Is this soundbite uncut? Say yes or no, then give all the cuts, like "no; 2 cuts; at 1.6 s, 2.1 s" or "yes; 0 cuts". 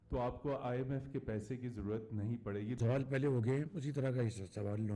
no; 1 cut; at 2.8 s